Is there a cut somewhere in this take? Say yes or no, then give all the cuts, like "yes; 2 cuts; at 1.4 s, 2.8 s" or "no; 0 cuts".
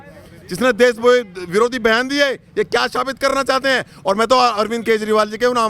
no; 0 cuts